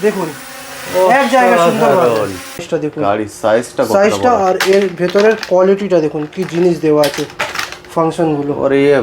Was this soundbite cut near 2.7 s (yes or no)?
yes